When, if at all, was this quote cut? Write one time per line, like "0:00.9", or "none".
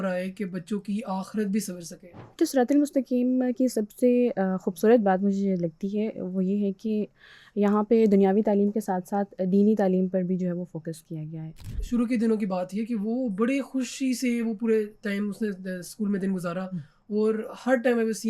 0:11.7